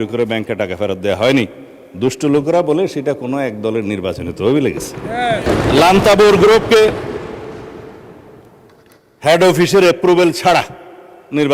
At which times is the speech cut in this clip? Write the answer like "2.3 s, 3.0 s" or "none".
5.4 s